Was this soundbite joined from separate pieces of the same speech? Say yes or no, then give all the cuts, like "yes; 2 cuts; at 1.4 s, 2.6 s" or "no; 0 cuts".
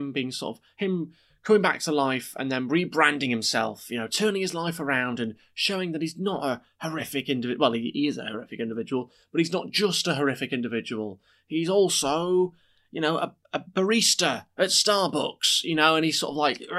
no; 0 cuts